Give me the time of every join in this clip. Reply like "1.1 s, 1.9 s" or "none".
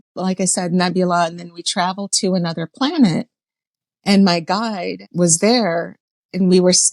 5.0 s

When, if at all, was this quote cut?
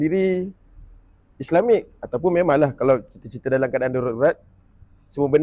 none

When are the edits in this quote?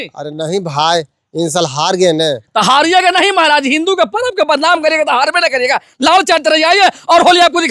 none

